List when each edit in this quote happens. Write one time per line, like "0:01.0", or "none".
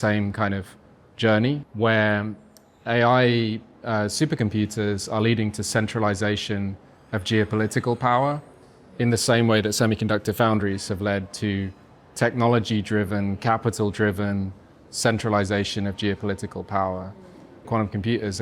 0:01.7
0:17.7